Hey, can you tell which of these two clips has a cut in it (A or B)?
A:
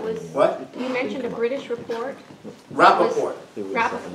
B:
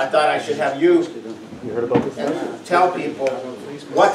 B